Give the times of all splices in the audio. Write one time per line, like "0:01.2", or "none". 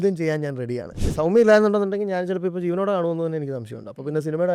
0:01.0